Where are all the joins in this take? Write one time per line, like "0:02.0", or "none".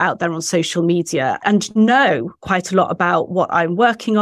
0:01.4

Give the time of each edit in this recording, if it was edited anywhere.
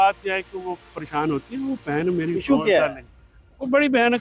none

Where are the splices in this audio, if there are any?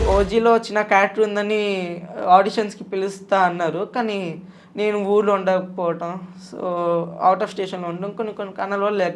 none

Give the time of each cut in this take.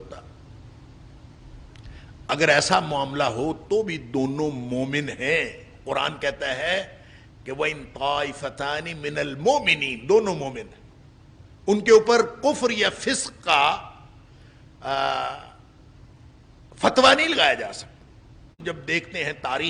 0:18.6

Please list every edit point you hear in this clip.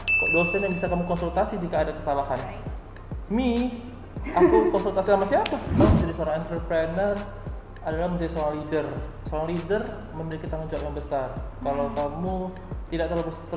0:05.8

